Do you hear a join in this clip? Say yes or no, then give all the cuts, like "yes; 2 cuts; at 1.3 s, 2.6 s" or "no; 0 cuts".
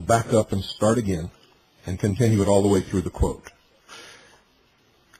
no; 0 cuts